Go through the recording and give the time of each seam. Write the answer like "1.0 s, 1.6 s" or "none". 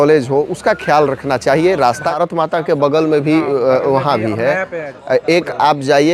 2.1 s

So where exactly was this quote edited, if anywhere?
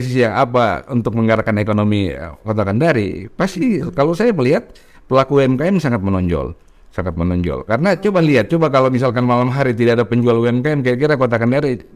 none

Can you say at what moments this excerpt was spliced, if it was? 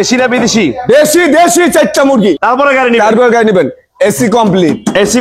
2.4 s

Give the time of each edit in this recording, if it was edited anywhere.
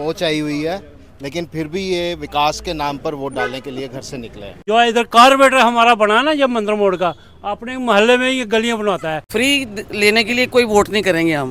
4.5 s, 9.2 s

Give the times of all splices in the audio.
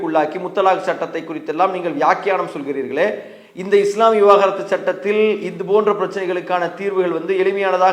none

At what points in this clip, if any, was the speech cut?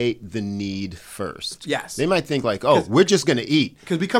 none

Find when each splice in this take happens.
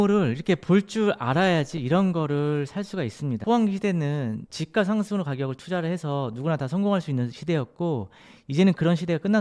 3.3 s

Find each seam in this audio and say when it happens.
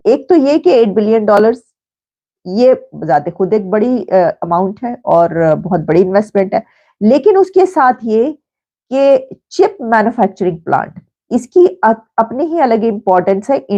none

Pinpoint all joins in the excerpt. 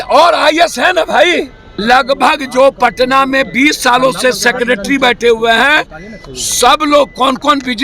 1.8 s

